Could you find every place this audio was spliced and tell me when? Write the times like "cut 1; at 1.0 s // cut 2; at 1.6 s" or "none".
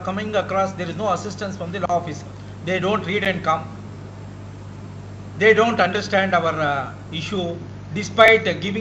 none